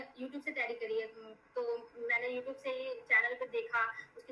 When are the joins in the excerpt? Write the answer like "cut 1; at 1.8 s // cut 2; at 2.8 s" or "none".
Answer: none